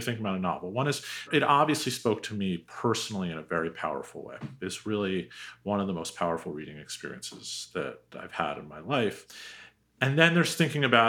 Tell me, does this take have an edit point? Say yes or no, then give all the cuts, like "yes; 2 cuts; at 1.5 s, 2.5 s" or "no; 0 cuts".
yes; 1 cut; at 1.3 s